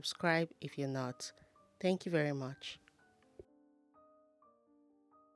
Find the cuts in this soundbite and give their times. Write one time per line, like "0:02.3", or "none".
0:04.0